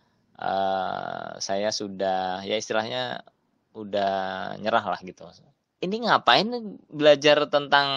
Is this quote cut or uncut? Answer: cut